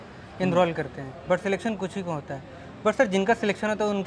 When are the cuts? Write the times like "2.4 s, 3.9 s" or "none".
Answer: none